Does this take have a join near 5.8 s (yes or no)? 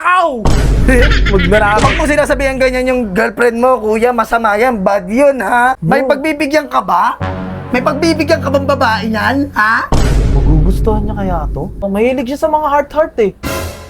yes